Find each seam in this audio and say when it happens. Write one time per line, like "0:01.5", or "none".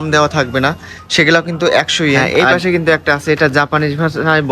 0:02.2